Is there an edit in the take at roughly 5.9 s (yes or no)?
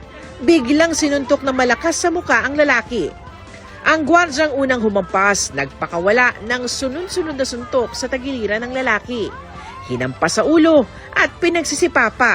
no